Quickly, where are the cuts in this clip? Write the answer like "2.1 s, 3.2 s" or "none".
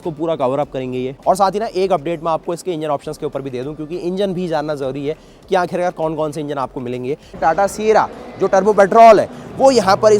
1.1 s, 7.4 s